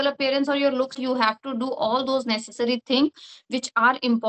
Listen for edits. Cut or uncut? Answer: cut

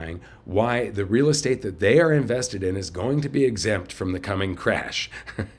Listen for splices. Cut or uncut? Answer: uncut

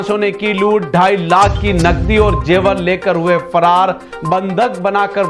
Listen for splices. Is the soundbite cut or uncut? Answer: uncut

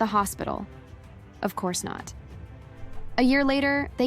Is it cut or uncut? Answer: cut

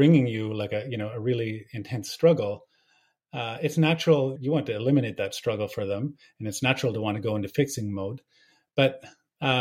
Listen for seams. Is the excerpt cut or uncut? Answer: cut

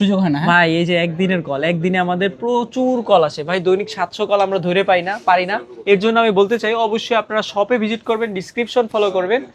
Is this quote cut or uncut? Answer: uncut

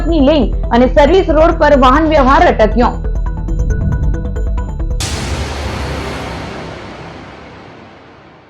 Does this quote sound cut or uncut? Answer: cut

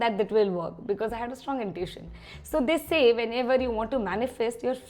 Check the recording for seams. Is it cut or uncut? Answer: uncut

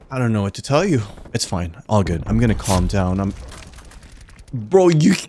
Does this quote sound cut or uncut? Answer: cut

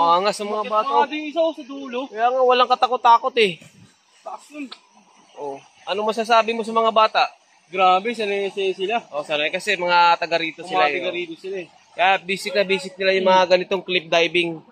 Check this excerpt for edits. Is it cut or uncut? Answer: uncut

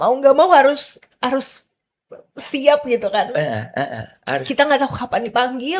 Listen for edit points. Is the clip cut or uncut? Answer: uncut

